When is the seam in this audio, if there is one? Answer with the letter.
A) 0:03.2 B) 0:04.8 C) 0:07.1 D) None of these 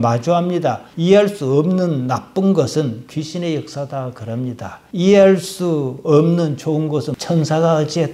C